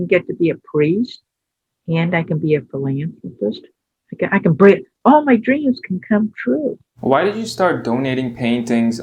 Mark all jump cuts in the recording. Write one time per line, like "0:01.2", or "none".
0:06.9